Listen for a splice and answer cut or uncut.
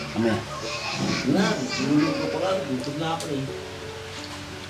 uncut